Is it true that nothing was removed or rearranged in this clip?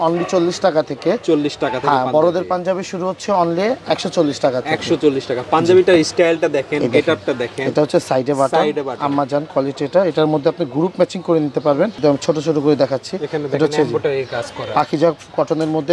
no; 1 cut; at 11.9 s

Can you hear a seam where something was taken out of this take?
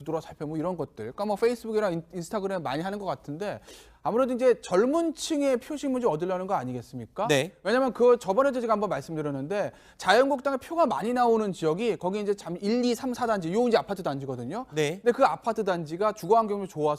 yes; 1 cut; at 2.0 s

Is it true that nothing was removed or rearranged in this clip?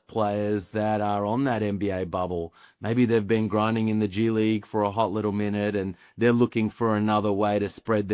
yes; 0 cuts

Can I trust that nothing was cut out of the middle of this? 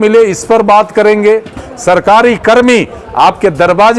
no; 1 cut; at 1.7 s

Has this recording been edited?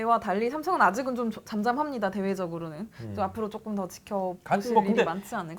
no; 0 cuts

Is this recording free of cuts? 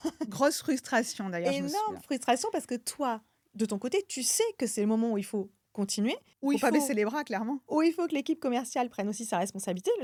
yes; 0 cuts

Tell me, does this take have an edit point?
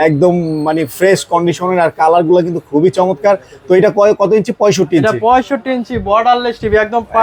no; 0 cuts

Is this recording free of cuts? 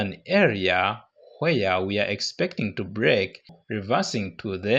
no; 1 cut; at 3.6 s

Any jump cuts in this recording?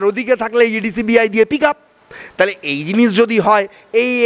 no; 0 cuts

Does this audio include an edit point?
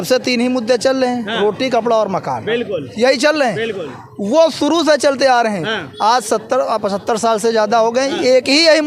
no; 0 cuts

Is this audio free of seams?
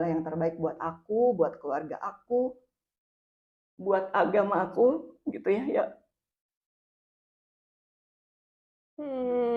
yes; 0 cuts

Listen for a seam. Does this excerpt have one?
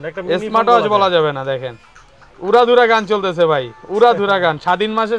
no; 0 cuts

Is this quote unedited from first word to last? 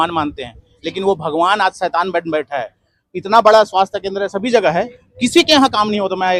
yes; 0 cuts

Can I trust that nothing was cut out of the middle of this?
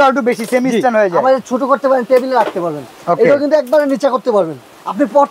yes; 0 cuts

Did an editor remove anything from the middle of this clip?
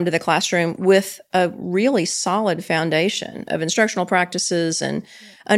no; 0 cuts

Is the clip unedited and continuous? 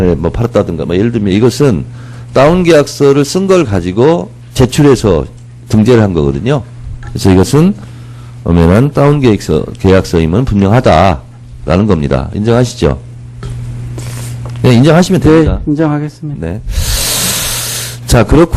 yes; 0 cuts

